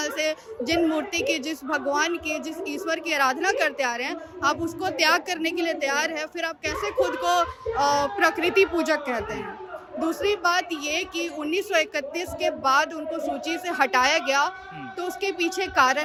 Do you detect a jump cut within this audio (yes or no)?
no